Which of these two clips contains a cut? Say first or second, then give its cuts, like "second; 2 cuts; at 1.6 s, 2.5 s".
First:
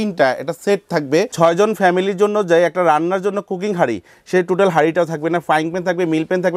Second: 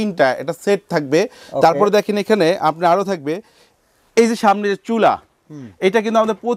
first; 1 cut; at 1.3 s